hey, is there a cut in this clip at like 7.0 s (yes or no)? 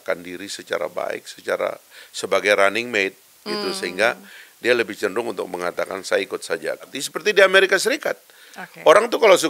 yes